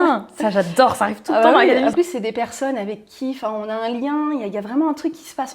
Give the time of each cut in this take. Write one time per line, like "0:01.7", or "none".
0:01.9